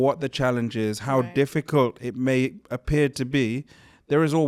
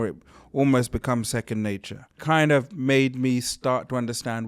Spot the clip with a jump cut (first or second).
second